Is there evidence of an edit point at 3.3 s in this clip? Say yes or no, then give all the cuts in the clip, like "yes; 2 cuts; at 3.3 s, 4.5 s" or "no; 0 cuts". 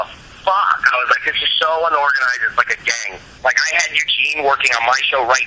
yes; 1 cut; at 3.3 s